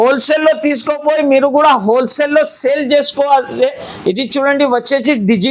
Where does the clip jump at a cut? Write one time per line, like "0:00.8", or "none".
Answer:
none